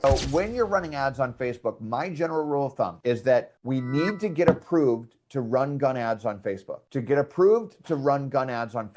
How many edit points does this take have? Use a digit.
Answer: 2